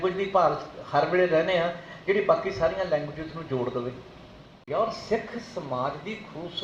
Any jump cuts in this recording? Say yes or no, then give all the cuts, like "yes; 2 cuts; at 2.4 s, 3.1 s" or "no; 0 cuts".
yes; 1 cut; at 4.6 s